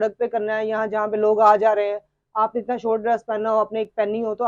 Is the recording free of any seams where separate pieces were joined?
yes; 0 cuts

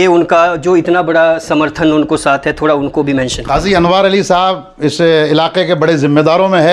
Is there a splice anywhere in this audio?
no; 0 cuts

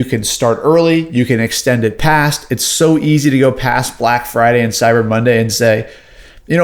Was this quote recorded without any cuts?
yes; 0 cuts

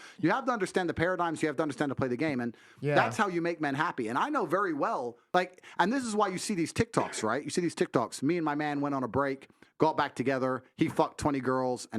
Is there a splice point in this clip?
yes; 1 cut; at 5.2 s

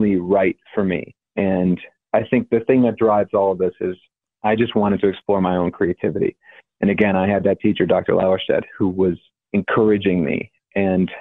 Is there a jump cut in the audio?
yes; 3 cuts; at 1.2 s, 1.9 s, 9.3 s

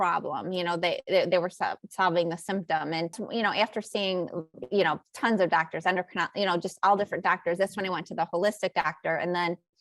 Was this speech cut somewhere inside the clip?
yes; 1 cut; at 3.2 s

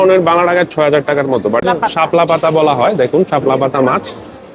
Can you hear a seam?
yes; 1 cut; at 1.6 s

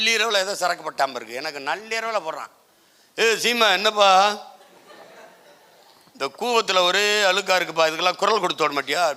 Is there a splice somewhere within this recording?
no; 0 cuts

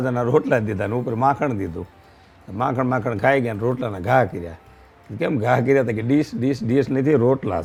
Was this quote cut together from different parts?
no; 0 cuts

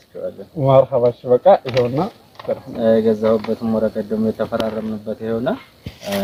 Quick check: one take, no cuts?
yes; 0 cuts

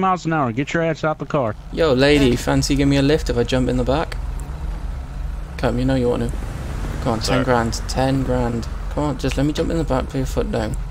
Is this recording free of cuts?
no; 1 cut; at 1.6 s

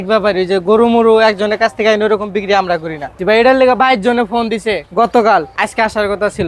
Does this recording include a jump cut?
yes; 3 cuts; at 3.2 s, 4.8 s, 5.5 s

